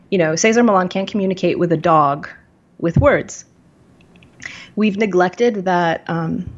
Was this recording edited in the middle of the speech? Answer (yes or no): no